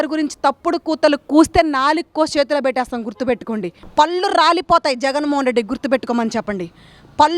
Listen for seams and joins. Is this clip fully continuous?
no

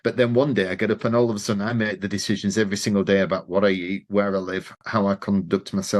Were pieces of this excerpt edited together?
no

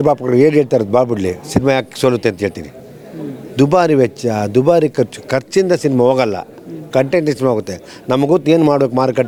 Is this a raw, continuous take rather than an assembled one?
yes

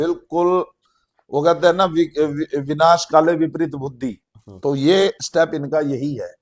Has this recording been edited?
no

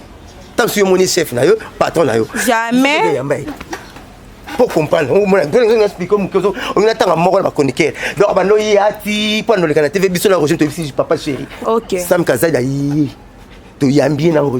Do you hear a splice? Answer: yes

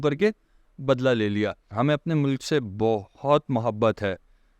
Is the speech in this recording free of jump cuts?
no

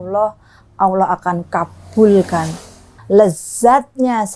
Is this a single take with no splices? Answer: no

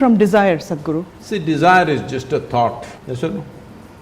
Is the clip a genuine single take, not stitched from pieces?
no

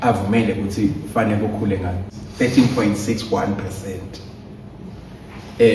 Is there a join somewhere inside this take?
yes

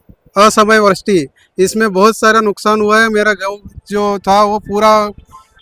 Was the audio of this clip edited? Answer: no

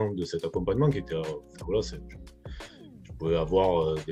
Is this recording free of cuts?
yes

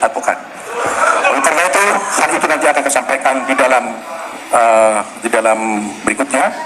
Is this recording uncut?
yes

